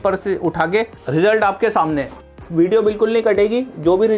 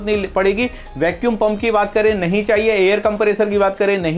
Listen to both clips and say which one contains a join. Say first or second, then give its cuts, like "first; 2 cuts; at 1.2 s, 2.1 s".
first; 1 cut; at 1.0 s